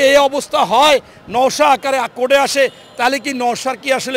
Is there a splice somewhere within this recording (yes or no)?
no